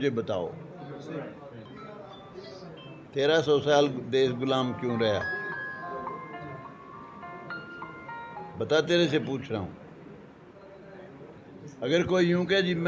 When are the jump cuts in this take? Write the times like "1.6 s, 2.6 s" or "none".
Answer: 1.7 s, 11.4 s